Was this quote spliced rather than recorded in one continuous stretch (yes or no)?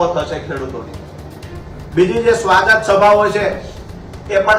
no